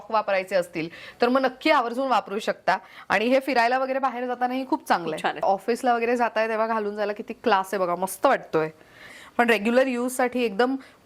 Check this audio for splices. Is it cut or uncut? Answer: cut